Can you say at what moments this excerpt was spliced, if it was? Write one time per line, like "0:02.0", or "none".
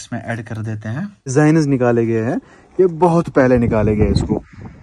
0:01.3